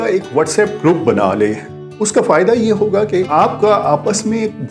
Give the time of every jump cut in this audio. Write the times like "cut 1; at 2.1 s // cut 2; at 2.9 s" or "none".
cut 1; at 3.3 s